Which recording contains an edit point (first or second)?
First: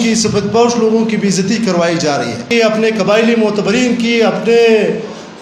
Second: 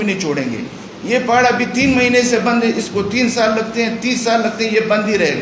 first